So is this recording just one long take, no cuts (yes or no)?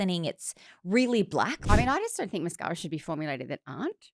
no